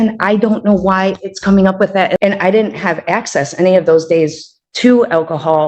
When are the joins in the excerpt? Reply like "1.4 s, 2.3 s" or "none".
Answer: 2.2 s